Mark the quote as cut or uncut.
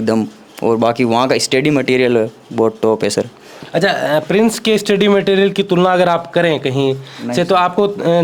uncut